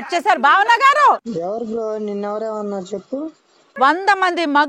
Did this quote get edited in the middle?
yes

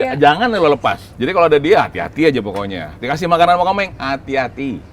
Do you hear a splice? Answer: yes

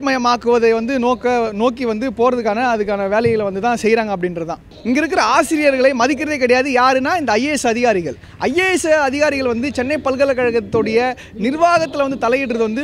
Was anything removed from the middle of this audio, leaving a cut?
yes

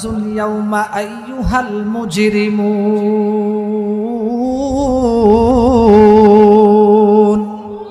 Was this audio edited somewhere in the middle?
no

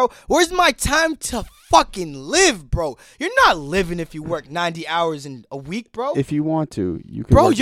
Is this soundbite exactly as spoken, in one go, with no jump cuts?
yes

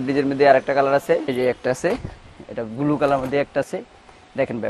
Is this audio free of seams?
no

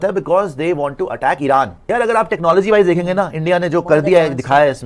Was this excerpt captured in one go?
no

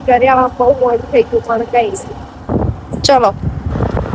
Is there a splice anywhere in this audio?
no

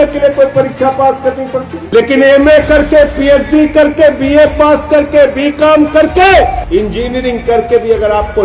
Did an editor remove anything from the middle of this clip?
yes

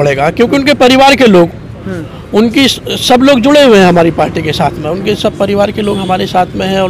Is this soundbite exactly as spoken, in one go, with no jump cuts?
yes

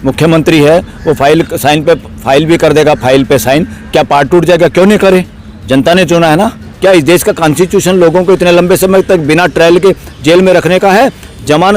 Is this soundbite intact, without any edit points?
no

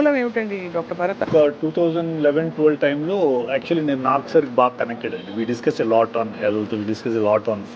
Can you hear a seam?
yes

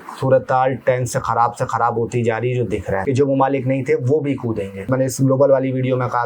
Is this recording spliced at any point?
yes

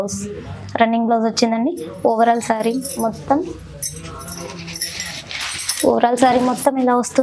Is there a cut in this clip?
no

